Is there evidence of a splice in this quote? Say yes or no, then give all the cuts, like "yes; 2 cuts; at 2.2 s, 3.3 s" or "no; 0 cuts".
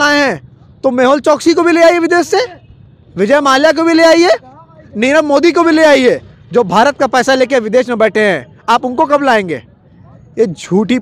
no; 0 cuts